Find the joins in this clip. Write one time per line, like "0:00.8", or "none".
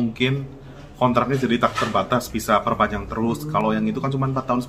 none

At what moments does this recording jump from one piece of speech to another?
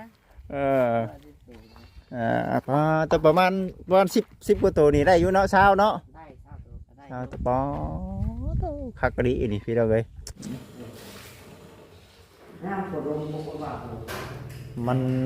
0:10.4

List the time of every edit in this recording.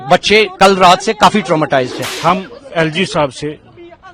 0:02.0

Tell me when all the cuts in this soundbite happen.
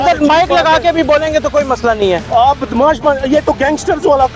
none

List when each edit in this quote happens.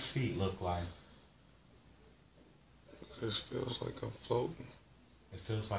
0:04.5

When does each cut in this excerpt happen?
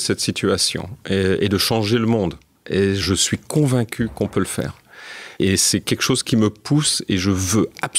0:03.0
0:05.5

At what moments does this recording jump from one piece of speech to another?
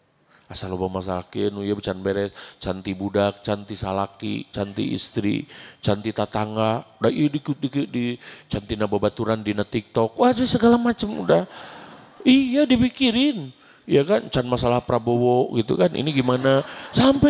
none

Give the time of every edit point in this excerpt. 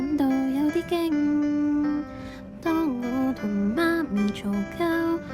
0:01.7

